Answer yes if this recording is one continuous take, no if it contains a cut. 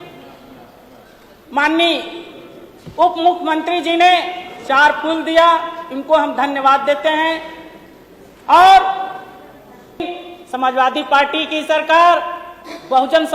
no